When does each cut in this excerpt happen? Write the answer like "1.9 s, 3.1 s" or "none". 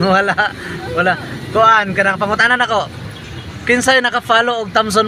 1.3 s